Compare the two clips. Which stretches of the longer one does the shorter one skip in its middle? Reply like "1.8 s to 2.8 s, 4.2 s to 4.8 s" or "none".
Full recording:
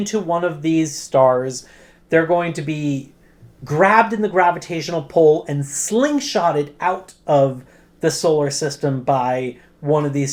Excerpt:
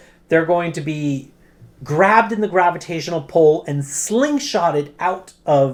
none